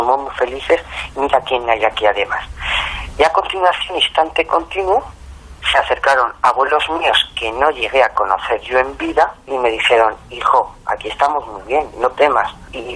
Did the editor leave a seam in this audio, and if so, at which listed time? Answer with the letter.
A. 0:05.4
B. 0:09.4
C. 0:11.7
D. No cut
B